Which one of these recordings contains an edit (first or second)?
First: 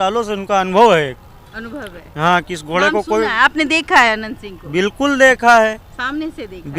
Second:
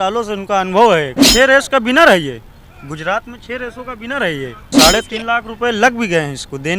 second